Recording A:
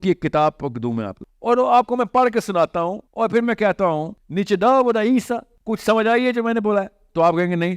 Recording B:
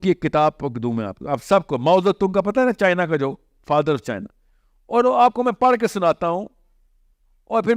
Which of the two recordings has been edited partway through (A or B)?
A